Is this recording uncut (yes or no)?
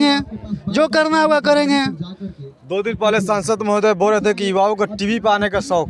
yes